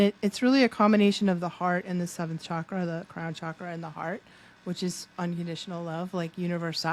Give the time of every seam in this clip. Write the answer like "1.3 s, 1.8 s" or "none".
none